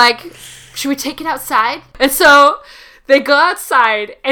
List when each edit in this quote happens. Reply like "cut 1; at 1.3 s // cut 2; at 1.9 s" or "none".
cut 1; at 2.0 s